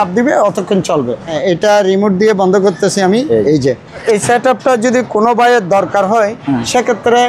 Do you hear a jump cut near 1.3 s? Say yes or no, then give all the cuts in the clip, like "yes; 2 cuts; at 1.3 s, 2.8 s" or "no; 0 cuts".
yes; 2 cuts; at 1.3 s, 4.0 s